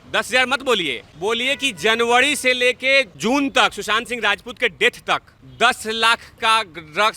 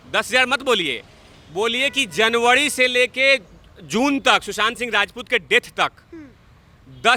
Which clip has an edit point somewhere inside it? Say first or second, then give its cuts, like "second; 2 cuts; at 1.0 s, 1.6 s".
first; 3 cuts; at 1.0 s, 3.1 s, 5.4 s